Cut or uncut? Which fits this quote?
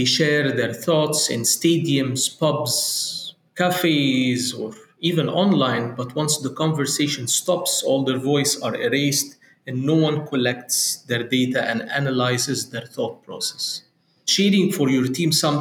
cut